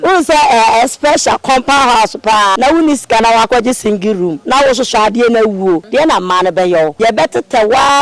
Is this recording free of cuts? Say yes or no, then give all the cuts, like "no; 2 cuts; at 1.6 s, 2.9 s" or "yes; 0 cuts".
no; 4 cuts; at 2.5 s, 4.4 s, 5.8 s, 6.9 s